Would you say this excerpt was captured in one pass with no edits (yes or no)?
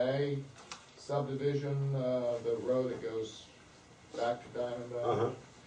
yes